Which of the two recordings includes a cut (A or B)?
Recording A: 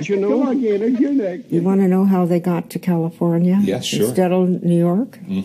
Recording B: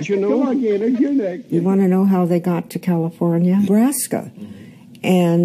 A